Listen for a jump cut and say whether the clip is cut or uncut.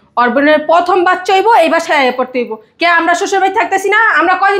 uncut